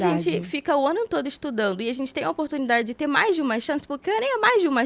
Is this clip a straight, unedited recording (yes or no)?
yes